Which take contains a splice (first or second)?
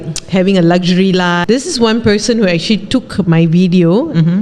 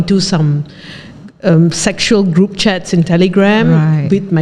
first